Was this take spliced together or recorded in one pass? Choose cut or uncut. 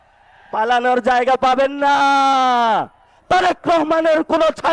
cut